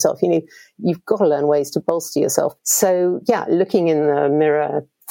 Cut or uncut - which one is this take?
cut